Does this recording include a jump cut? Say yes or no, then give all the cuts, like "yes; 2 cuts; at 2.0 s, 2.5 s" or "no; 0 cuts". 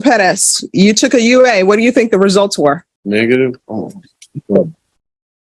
yes; 1 cut; at 2.9 s